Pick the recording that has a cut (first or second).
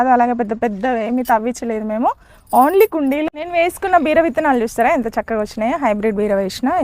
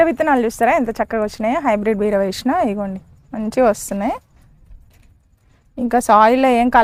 first